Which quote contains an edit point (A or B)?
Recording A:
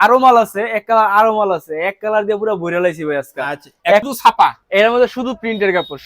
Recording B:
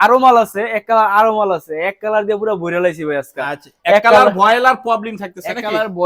A